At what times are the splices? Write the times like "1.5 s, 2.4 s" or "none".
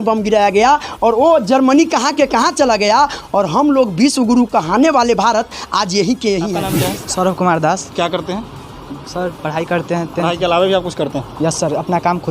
6.7 s